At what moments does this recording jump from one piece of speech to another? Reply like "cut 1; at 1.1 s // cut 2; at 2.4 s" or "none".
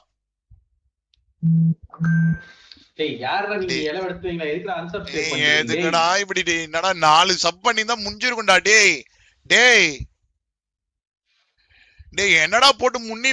none